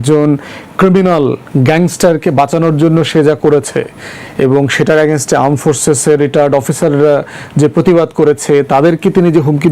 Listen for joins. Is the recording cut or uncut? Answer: uncut